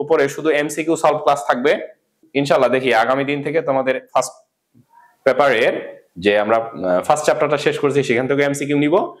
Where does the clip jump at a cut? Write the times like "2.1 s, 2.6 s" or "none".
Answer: 2.2 s